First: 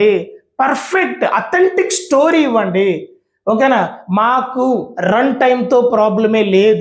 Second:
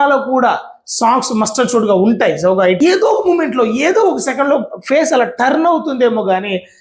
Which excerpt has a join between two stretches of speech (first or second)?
second